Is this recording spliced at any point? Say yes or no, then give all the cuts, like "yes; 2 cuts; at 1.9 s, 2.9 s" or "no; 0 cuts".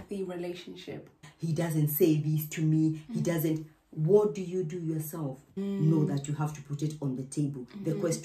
yes; 2 cuts; at 1.2 s, 5.5 s